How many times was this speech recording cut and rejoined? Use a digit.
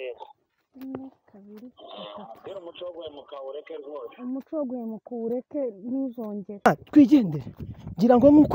1